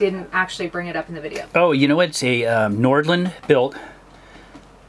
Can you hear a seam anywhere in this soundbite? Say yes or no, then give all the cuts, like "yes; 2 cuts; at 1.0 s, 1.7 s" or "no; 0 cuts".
no; 0 cuts